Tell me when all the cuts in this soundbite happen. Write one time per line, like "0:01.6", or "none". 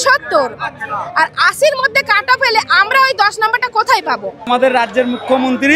0:04.5